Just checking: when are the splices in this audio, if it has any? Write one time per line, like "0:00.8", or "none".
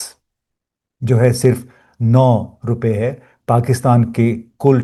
none